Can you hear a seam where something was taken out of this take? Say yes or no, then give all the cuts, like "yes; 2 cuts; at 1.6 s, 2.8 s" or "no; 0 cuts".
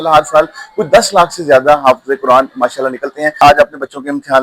yes; 1 cut; at 3.3 s